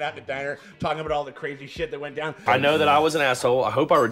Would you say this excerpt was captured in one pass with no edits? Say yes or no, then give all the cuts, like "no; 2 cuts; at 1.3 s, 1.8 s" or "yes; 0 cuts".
no; 1 cut; at 2.5 s